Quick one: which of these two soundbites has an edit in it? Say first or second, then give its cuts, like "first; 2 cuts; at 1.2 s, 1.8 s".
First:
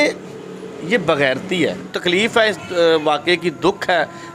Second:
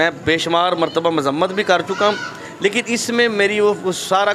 first; 1 cut; at 1.9 s